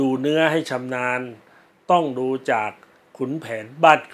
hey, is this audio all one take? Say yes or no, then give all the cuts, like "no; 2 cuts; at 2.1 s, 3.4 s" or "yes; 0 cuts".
yes; 0 cuts